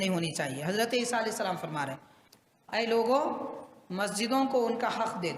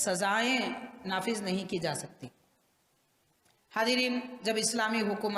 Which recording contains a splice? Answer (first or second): first